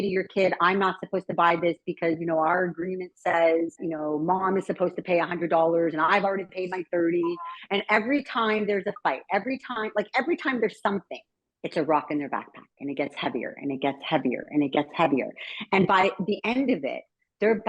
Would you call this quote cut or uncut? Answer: cut